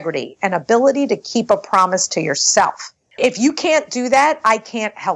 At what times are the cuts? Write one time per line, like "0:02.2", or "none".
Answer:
0:03.2